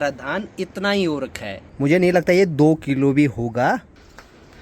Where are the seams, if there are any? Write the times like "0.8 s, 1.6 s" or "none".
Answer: none